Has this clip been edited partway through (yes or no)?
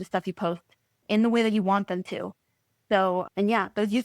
yes